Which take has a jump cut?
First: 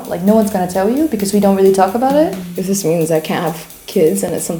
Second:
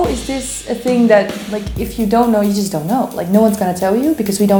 first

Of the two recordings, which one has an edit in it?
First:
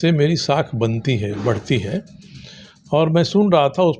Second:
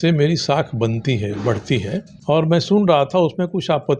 second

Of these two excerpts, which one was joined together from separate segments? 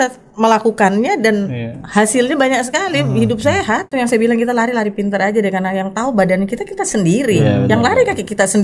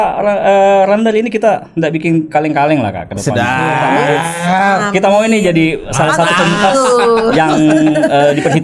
first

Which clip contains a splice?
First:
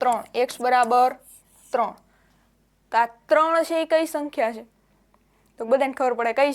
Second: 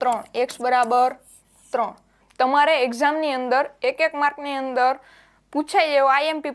second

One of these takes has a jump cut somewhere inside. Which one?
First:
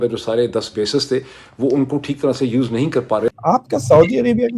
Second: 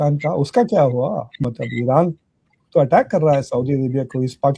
first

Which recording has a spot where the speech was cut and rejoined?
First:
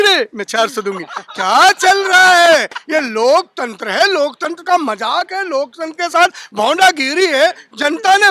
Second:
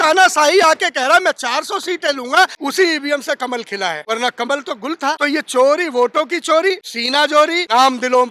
second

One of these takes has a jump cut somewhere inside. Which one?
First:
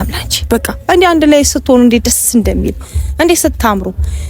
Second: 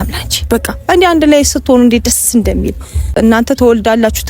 second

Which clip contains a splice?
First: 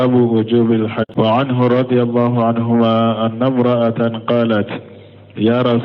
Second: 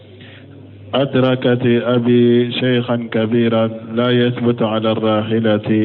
first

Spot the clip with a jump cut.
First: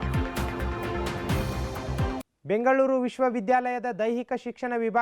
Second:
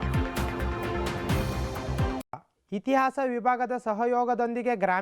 second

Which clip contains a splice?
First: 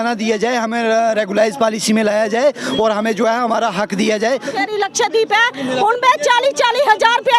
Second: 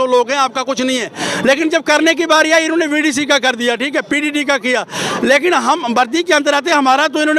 first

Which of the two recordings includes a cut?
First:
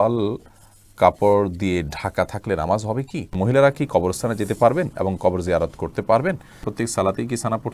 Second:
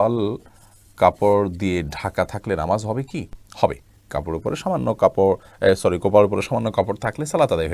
first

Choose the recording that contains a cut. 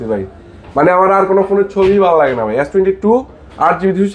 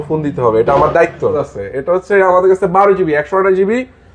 second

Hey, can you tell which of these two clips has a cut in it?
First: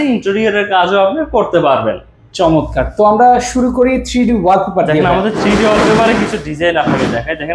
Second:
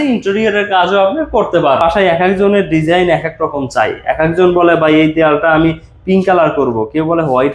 second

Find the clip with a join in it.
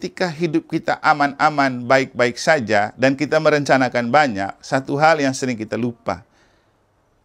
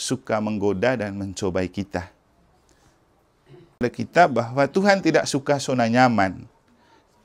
second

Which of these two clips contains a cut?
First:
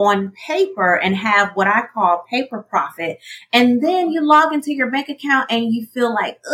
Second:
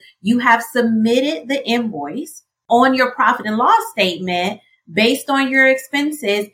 second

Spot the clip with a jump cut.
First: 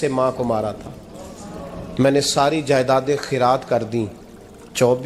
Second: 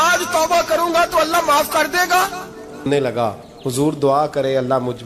second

